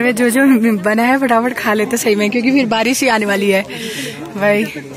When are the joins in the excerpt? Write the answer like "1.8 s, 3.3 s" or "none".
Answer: none

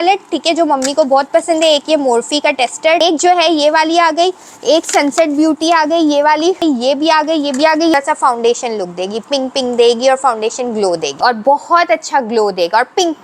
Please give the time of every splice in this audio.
3.0 s, 6.6 s, 7.9 s, 11.1 s

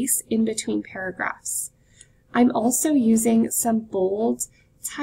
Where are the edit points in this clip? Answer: none

